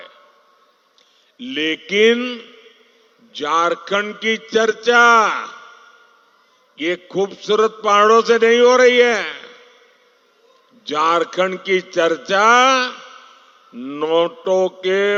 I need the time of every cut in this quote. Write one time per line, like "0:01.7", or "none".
none